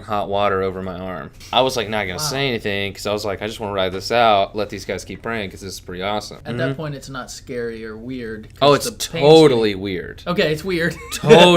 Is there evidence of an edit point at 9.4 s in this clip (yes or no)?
no